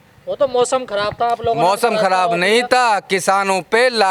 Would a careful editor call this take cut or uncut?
uncut